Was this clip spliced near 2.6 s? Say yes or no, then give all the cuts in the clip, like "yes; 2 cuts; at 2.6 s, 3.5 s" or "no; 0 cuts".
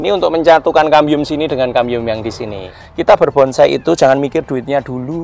yes; 1 cut; at 2.6 s